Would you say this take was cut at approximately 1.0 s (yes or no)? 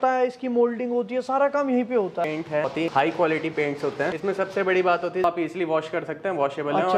no